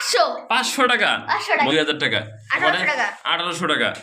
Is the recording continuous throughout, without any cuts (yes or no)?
no